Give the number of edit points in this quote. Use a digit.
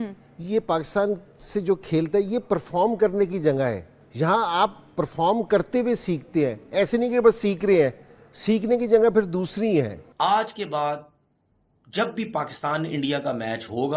2